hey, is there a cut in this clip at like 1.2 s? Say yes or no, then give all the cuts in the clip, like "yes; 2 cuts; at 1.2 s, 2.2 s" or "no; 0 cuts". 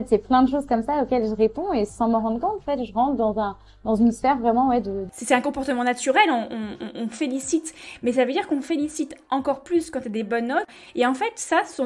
no; 2 cuts; at 5.0 s, 10.7 s